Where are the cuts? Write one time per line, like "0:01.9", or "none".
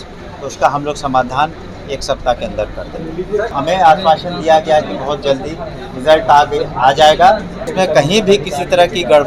0:03.5
0:07.6